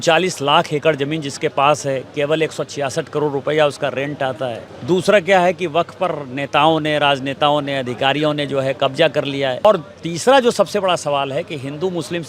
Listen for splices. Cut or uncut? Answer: cut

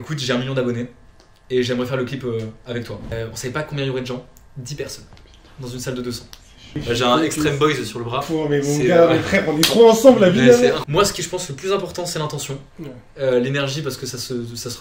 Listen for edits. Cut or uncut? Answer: cut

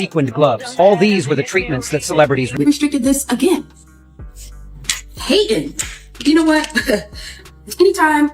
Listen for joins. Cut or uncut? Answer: cut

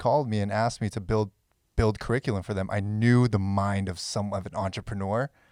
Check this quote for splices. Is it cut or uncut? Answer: uncut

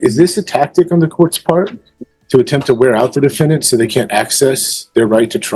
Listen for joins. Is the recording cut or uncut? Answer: uncut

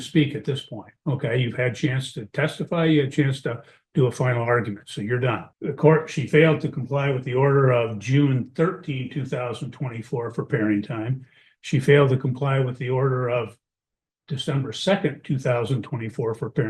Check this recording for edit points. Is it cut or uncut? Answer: uncut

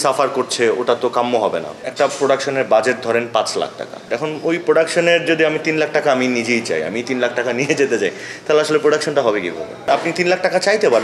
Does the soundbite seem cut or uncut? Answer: cut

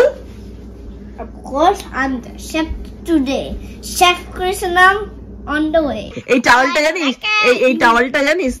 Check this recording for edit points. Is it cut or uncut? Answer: cut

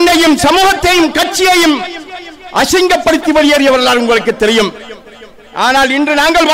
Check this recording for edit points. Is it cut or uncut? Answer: uncut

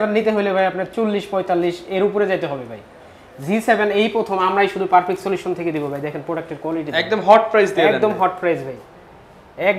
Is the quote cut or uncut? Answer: uncut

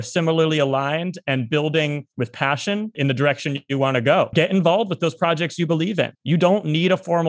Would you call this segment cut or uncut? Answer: cut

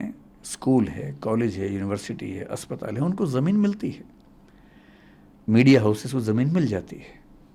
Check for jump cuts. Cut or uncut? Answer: uncut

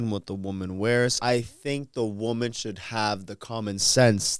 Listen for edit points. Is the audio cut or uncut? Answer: cut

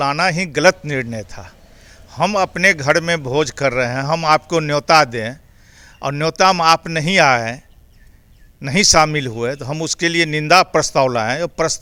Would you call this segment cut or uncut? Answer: uncut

